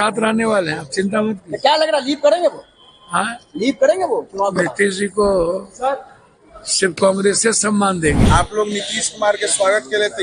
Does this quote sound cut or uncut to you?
cut